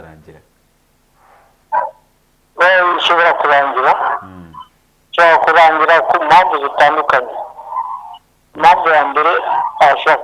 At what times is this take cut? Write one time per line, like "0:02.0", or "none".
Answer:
none

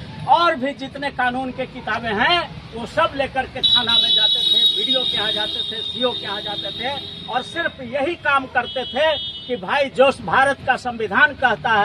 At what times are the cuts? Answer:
none

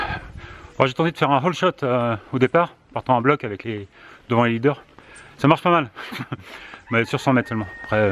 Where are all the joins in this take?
none

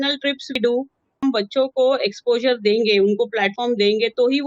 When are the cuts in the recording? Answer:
0:01.2

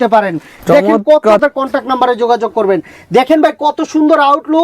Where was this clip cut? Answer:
0:01.4

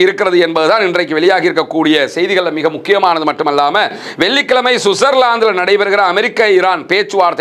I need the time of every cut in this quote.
none

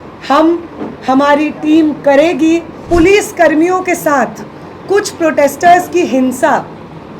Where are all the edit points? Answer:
0:02.7

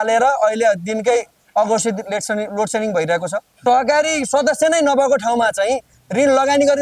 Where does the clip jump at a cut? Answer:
0:03.6

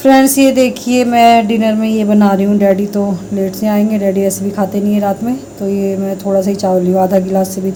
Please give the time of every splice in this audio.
none

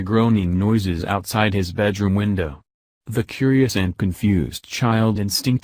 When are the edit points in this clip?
0:03.8

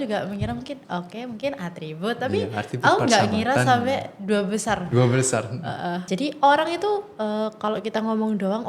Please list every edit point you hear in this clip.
0:06.1

